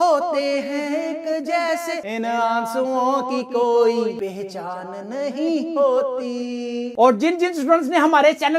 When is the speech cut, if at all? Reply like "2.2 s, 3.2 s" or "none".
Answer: 6.9 s